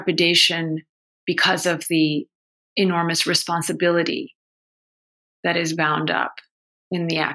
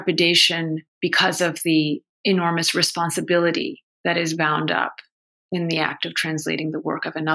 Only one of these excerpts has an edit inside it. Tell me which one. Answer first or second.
second